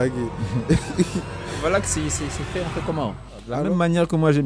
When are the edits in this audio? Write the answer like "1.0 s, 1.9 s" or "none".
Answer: 3.5 s